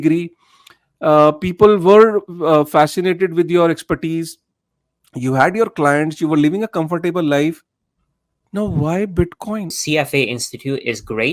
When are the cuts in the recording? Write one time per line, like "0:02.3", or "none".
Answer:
0:09.7